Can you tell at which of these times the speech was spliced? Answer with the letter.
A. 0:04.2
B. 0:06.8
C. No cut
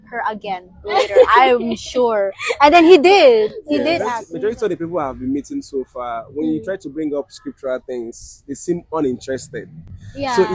A